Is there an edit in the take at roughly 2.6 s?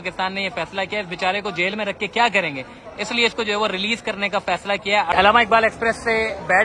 no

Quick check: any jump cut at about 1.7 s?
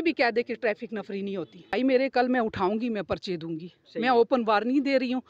yes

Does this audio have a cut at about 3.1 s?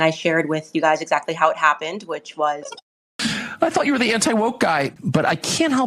yes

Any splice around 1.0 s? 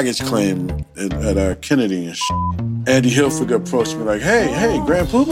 no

